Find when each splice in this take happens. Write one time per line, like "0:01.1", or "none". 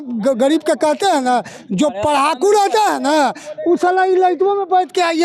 none